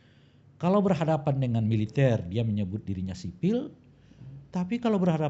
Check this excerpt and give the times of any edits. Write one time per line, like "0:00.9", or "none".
none